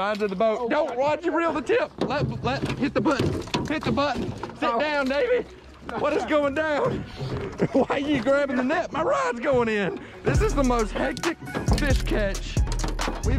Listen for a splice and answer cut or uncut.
uncut